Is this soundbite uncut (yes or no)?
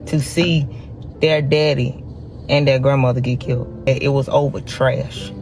no